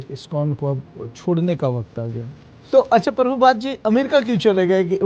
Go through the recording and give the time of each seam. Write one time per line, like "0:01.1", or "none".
0:02.6